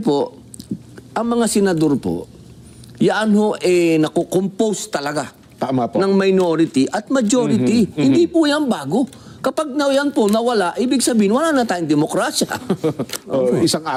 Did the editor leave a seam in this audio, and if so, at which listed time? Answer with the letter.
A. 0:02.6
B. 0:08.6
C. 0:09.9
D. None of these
D